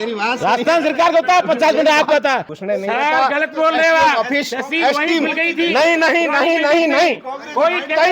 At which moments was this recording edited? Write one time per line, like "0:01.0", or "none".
0:02.5